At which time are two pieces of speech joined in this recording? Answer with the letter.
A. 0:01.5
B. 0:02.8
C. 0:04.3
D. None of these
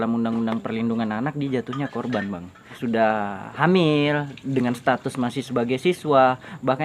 B